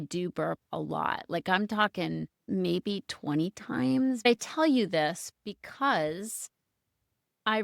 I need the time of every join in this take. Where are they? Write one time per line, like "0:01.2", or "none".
0:02.4
0:04.2